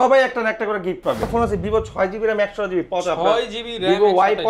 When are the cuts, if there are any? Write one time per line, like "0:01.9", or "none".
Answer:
0:01.3